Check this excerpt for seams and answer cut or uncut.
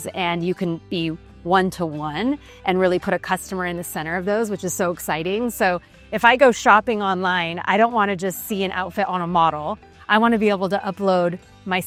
uncut